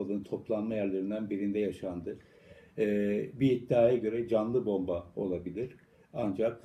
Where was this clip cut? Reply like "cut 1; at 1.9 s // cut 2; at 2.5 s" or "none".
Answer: none